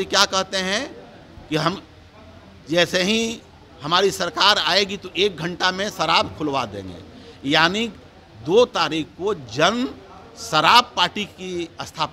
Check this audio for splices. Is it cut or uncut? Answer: uncut